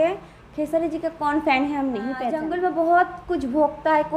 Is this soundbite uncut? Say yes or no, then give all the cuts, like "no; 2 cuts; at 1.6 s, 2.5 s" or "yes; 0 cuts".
no; 1 cut; at 2.3 s